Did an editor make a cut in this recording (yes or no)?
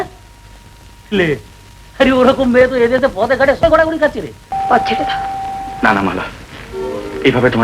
yes